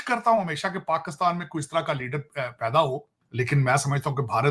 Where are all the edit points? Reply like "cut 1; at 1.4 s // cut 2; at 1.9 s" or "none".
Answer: cut 1; at 3.2 s